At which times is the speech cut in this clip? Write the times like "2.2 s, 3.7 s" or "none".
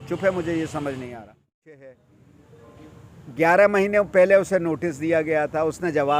1.2 s